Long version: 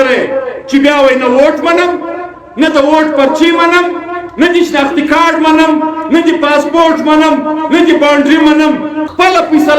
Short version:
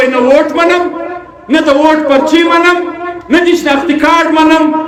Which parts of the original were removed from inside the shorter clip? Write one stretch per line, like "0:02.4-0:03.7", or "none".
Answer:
none